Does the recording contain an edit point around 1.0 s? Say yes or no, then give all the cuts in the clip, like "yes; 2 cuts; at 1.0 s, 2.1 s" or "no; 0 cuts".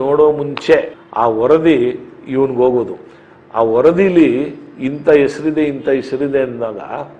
yes; 1 cut; at 1.0 s